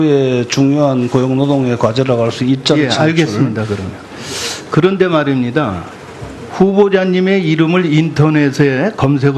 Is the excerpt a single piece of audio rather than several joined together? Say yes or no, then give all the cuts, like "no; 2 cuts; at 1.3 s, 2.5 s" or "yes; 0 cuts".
yes; 0 cuts